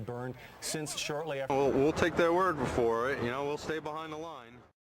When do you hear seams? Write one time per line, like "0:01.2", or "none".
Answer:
0:01.5